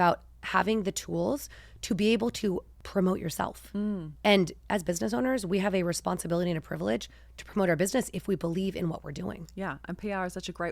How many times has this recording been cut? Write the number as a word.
one